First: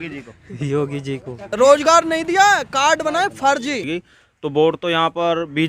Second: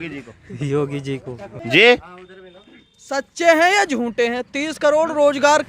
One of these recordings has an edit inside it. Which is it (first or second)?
first